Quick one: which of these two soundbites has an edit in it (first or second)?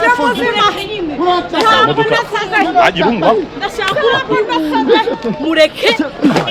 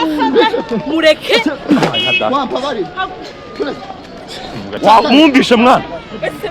second